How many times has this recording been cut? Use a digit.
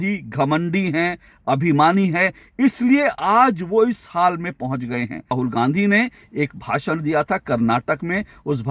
1